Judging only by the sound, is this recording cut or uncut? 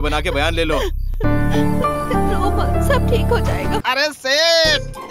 cut